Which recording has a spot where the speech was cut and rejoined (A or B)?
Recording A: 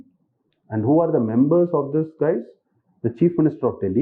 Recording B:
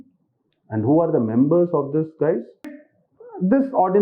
B